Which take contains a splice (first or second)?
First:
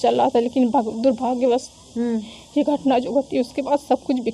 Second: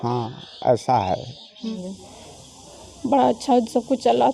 second